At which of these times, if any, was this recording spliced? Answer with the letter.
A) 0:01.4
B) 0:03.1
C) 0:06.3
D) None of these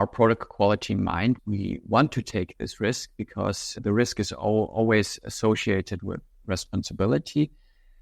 A